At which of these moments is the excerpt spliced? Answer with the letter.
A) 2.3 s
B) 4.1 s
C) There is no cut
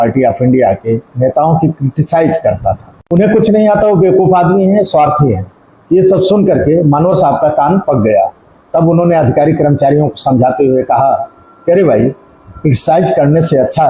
C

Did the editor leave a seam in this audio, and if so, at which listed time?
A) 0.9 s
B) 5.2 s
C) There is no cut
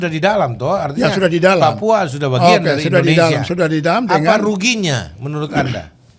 C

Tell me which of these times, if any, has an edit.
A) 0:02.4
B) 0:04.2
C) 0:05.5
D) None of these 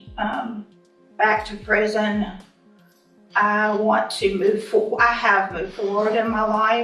D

